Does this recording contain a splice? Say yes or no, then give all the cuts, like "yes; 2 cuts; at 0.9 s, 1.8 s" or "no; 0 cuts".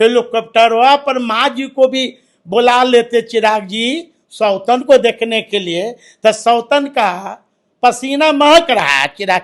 no; 0 cuts